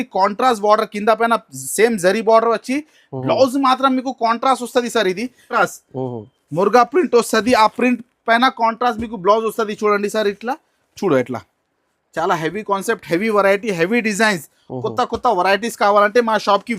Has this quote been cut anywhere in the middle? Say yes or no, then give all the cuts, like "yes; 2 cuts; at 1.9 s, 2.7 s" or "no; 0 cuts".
yes; 1 cut; at 5.6 s